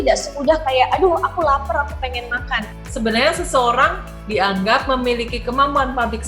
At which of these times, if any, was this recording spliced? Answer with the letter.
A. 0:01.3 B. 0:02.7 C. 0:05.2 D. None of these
B